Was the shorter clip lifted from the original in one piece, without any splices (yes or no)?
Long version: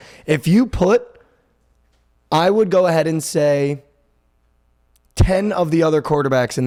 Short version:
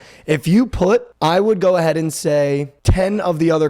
no